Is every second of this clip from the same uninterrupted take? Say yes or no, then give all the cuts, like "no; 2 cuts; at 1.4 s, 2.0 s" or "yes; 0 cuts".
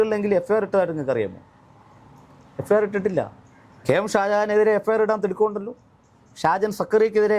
yes; 0 cuts